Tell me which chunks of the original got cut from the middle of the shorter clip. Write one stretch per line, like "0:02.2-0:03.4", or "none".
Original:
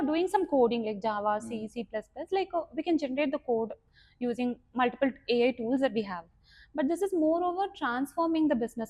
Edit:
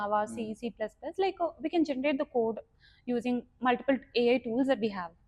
none